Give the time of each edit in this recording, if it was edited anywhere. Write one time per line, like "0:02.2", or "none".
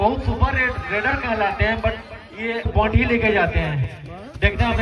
0:02.7